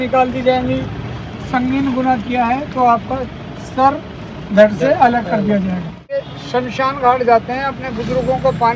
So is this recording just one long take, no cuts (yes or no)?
no